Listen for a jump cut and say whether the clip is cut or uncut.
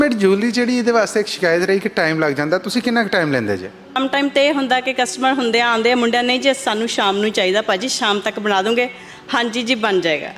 cut